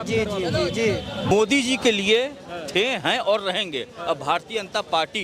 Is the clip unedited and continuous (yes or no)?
no